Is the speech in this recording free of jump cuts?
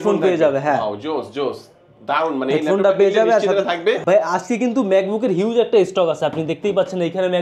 no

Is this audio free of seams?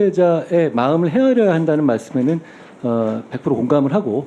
yes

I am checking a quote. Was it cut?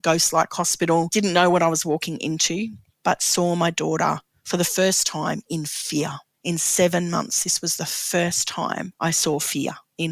yes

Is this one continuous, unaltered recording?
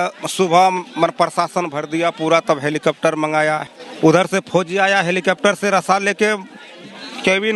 no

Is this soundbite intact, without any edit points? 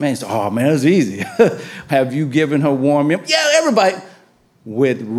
no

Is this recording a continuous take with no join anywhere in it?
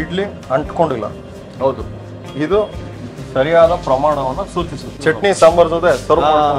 no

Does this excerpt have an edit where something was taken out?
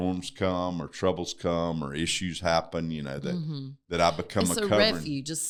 no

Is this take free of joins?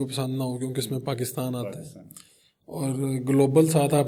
yes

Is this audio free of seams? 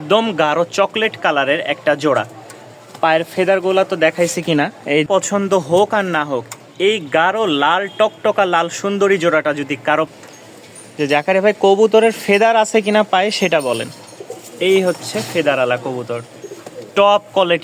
no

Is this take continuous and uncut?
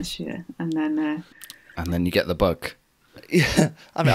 no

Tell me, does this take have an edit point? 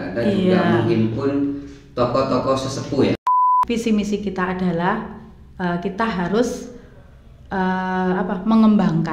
yes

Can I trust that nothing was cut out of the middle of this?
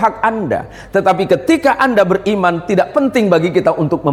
yes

